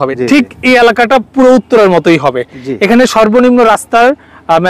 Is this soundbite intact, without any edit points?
yes; 0 cuts

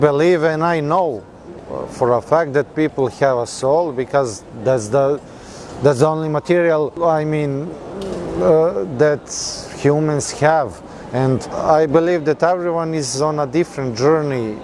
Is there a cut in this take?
no; 0 cuts

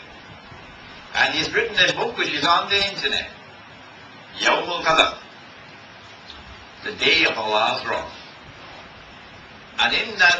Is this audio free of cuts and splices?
yes; 0 cuts

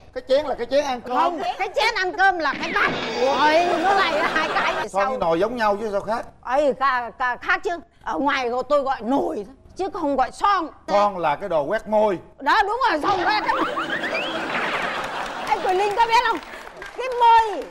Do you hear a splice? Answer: yes; 1 cut; at 4.8 s

